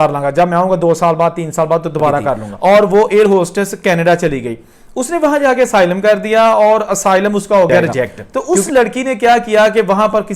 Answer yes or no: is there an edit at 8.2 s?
yes